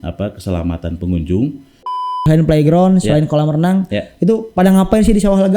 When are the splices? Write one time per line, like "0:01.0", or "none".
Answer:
0:02.2